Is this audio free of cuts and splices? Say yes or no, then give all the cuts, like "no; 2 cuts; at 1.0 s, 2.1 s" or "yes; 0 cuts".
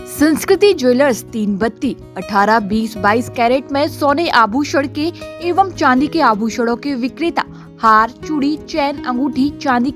yes; 0 cuts